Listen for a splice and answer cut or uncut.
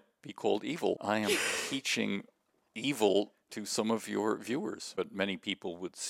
cut